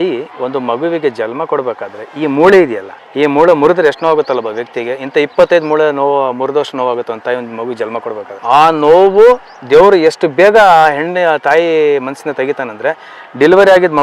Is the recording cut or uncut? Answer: uncut